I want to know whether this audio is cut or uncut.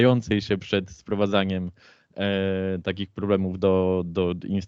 uncut